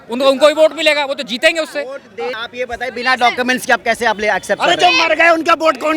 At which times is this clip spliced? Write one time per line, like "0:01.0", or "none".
0:02.4